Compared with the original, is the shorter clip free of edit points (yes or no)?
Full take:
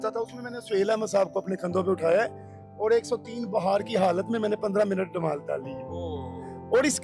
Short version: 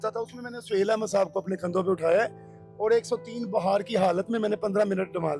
yes